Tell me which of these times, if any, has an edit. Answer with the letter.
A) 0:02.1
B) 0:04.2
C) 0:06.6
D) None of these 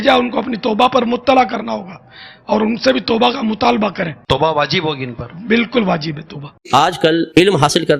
C